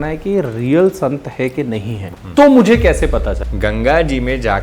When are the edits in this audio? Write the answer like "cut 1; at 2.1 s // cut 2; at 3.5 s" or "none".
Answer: cut 1; at 2.0 s // cut 2; at 3.3 s